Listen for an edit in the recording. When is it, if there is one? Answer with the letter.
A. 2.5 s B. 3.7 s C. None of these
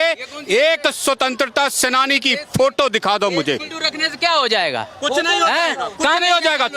B